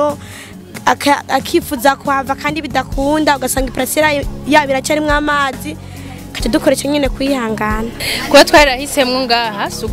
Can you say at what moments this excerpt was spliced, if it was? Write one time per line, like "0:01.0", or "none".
0:08.2